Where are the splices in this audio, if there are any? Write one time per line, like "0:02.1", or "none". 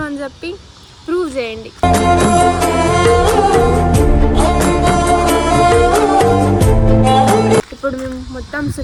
none